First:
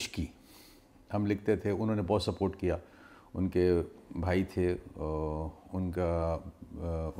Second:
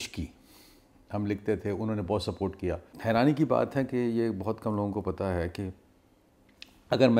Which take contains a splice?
second; 1 cut; at 2.9 s

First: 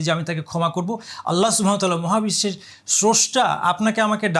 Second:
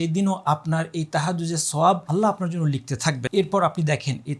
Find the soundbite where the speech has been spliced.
second; 2 cuts; at 2.0 s, 3.2 s

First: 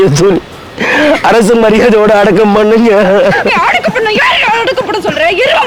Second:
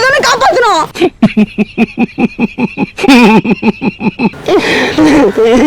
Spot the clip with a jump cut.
second; 1 cut; at 4.3 s

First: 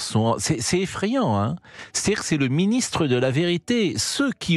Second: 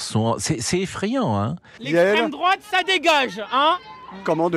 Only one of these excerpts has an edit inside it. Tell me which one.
second; 1 cut; at 1.7 s

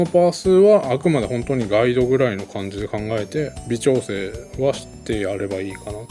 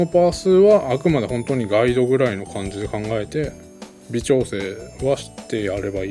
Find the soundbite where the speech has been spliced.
first; 1 cut; at 3.6 s

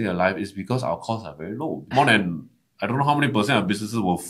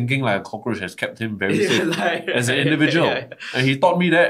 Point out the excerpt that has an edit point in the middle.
first; 1 cut; at 1.9 s

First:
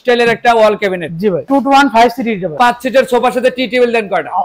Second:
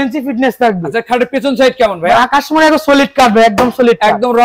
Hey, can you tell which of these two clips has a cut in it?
first; 2 cuts; at 1.5 s, 2.5 s

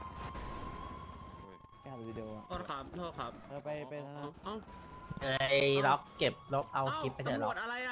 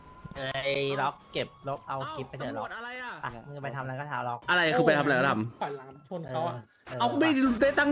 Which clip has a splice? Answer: second; 1 cut; at 4.4 s

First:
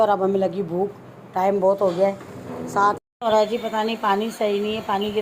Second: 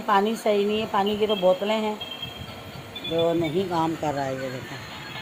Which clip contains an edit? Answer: first; 1 cut; at 2.9 s

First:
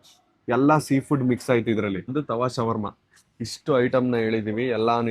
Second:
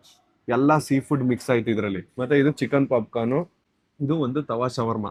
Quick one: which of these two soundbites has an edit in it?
first; 1 cut; at 2.1 s

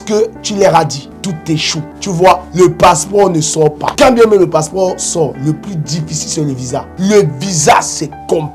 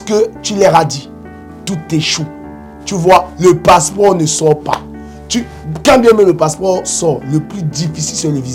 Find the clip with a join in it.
first; 4 cuts; at 1.1 s, 1.9 s, 3.8 s, 6.9 s

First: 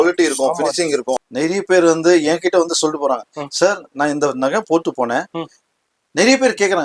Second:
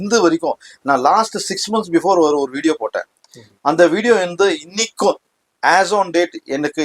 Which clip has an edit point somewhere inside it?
first; 1 cut; at 1.3 s

